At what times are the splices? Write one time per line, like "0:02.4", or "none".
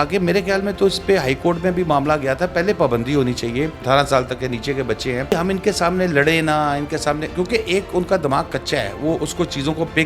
0:03.8
0:05.3